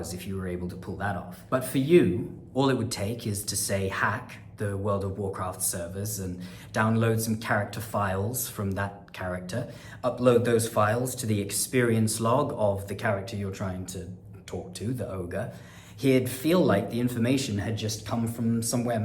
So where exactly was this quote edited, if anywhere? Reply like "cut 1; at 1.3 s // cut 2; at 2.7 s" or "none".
cut 1; at 1.4 s // cut 2; at 2.4 s